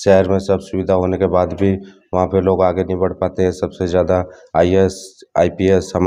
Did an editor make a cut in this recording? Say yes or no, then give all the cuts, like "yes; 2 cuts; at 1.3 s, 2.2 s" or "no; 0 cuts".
no; 0 cuts